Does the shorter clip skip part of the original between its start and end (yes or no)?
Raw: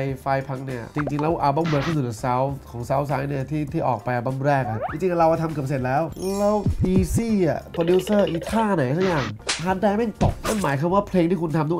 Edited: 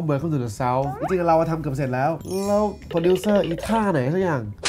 yes